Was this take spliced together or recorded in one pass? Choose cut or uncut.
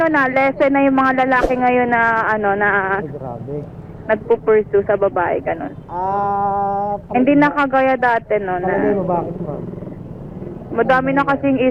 uncut